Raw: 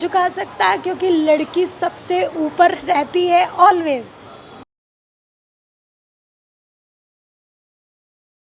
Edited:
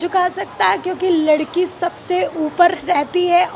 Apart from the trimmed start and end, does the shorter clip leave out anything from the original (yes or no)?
no